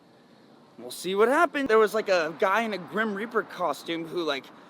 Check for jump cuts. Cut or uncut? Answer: cut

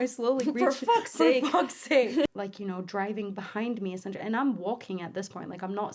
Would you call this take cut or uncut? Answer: cut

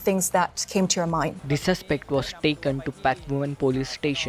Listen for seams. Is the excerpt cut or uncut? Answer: cut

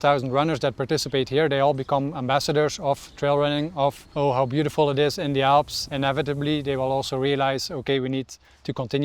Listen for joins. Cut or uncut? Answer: cut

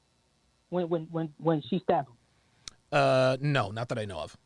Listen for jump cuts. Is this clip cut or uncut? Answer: uncut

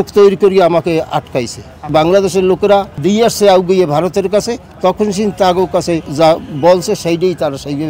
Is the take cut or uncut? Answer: cut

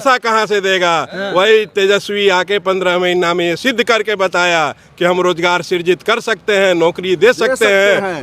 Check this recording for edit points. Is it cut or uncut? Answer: uncut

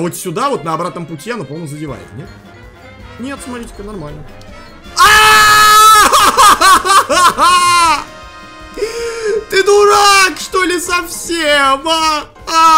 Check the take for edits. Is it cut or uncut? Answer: uncut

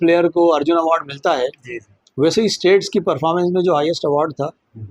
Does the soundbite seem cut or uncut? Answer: uncut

